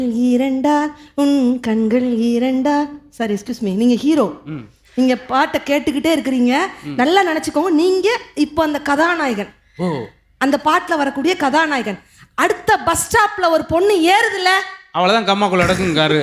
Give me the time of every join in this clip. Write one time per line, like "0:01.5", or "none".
none